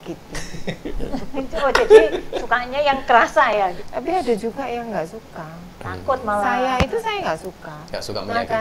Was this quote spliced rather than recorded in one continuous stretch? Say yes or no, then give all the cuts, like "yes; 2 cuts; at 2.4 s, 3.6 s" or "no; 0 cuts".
yes; 1 cut; at 3.8 s